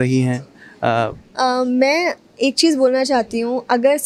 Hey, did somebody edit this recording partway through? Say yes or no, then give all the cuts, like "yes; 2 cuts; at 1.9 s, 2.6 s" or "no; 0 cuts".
no; 0 cuts